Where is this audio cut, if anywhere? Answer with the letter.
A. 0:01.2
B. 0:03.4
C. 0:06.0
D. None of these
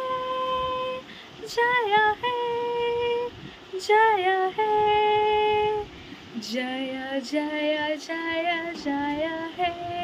D